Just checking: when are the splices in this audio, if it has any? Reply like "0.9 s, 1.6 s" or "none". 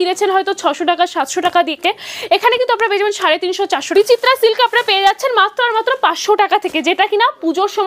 3.9 s